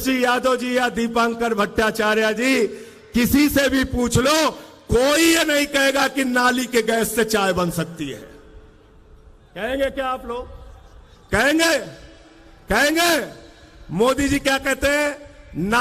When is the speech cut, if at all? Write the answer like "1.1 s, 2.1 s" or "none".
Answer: none